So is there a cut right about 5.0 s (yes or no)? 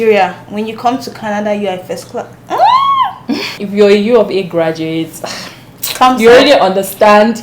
no